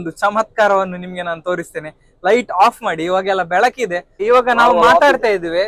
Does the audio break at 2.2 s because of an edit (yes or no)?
no